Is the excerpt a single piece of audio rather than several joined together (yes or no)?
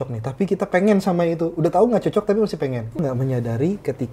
no